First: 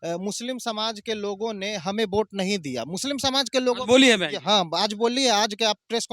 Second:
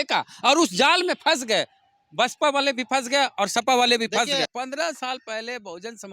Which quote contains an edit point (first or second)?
second